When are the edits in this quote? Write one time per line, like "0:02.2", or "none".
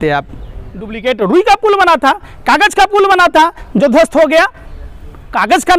0:00.9